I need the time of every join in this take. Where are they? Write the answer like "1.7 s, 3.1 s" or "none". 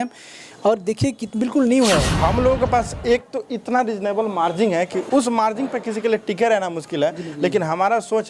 2.1 s, 5.0 s